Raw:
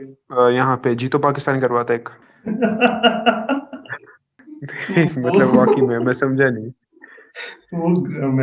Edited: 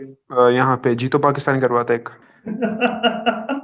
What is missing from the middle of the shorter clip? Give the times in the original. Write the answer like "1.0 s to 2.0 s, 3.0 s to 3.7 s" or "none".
none